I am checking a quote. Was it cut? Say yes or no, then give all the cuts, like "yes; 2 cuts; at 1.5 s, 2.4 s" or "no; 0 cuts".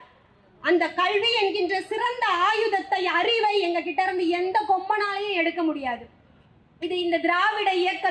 no; 0 cuts